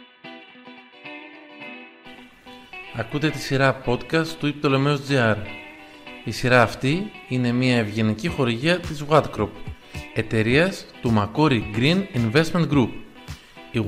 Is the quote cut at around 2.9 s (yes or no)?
yes